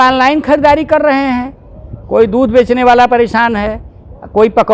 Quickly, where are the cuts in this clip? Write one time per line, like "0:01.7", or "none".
none